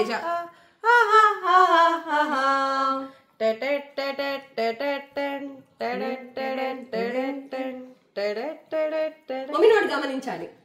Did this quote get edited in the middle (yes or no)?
no